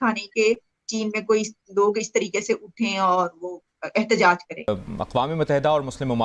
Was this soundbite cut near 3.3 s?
no; 1 cut; at 4.7 s

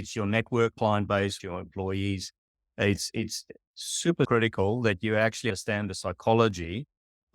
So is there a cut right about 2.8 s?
no; 4 cuts; at 0.7 s, 1.4 s, 4.3 s, 5.5 s

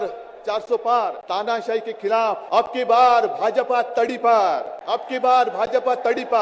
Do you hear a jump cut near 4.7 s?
yes; 3 cuts; at 1.2 s, 2.4 s, 4.7 s

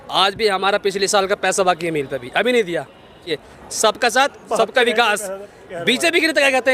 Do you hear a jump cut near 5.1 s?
no; 1 cut; at 3.4 s

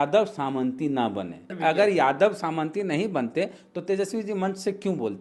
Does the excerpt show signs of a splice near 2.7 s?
no; 1 cut; at 1.5 s

